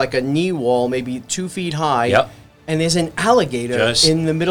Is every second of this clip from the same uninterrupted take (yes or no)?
yes